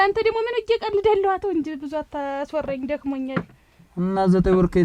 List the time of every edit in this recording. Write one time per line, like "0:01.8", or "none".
none